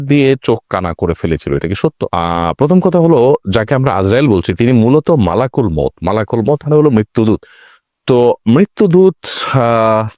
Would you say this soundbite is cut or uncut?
uncut